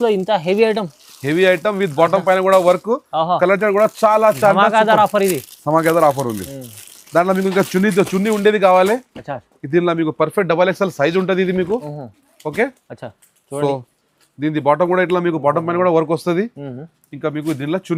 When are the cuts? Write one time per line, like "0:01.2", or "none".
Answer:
none